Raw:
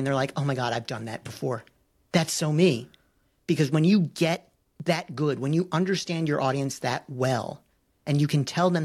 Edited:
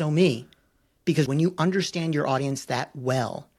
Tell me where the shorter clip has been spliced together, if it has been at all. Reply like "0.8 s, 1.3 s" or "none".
1.3 s